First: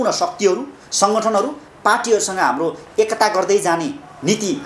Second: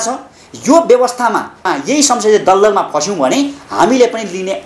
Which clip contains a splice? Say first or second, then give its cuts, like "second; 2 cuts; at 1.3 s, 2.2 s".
second; 1 cut; at 1.5 s